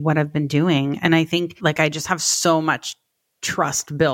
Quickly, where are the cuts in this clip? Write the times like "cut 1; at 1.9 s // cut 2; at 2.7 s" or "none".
cut 1; at 1.6 s